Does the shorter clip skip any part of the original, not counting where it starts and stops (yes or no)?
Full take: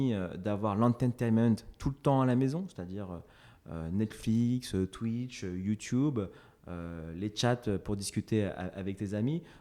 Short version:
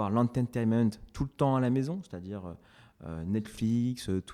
no